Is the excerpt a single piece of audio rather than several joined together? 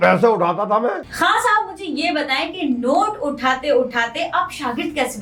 no; 1 cut; at 1.1 s

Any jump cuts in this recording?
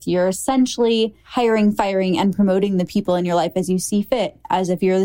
yes; 1 cut; at 1.2 s

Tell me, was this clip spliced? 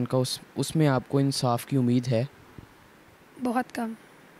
no; 0 cuts

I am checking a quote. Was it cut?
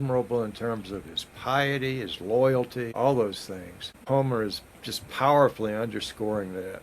yes; 2 cuts; at 2.9 s, 4.0 s

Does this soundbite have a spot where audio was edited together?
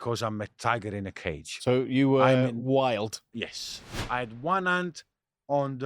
yes; 1 cut; at 4.0 s

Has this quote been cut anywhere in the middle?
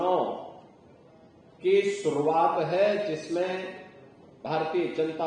no; 0 cuts

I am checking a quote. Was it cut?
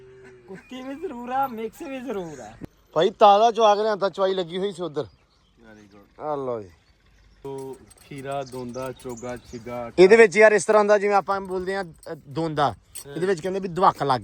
yes; 2 cuts; at 2.4 s, 7.4 s

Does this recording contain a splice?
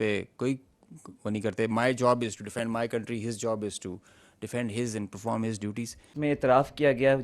yes; 1 cut; at 6.1 s

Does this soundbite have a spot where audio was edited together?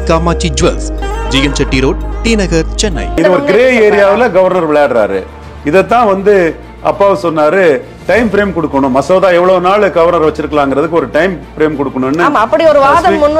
yes; 1 cut; at 3.2 s

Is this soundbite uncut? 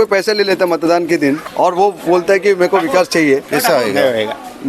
no; 2 cuts; at 1.5 s, 3.5 s

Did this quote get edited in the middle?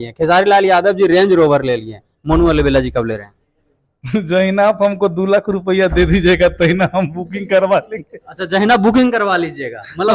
no; 0 cuts

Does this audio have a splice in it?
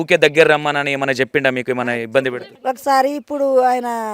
yes; 1 cut; at 2.5 s

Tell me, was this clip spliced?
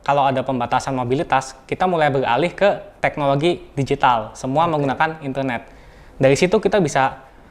yes; 1 cut; at 2.9 s

